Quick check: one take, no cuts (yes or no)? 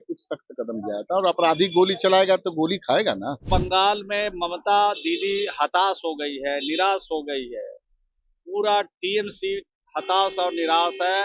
no